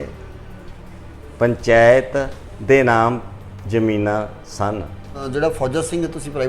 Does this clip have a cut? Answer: yes; 1 cut; at 5.1 s

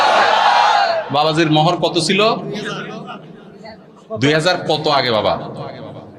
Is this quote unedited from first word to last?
yes; 0 cuts

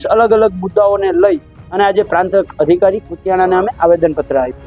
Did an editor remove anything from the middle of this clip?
no; 0 cuts

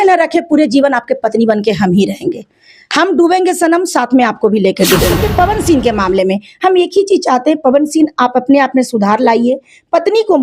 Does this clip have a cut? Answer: yes; 1 cut; at 5.1 s

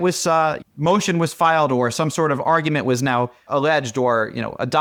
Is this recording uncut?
yes; 0 cuts

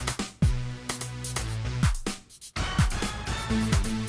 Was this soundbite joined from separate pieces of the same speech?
yes; 1 cut; at 2.4 s

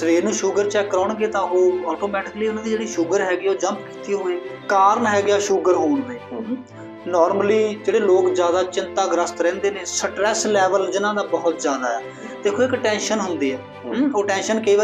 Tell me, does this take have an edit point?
yes; 1 cut; at 4.5 s

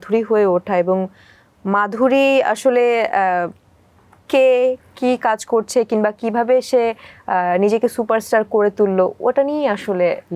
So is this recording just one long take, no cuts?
yes; 0 cuts

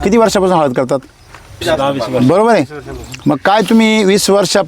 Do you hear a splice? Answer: yes; 1 cut; at 1.6 s

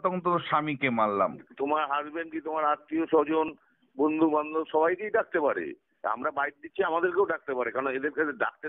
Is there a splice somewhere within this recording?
yes; 1 cut; at 1.5 s

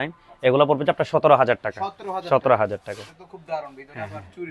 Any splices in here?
no; 0 cuts

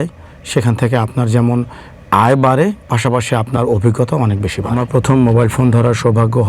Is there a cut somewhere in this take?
yes; 1 cut; at 4.7 s

